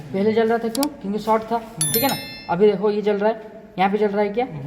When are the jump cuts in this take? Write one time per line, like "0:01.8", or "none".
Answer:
none